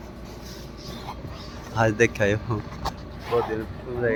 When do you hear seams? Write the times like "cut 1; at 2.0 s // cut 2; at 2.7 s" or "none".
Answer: none